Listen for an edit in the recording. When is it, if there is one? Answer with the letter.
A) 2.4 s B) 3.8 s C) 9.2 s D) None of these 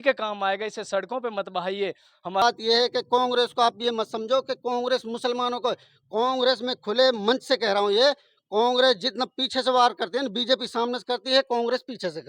A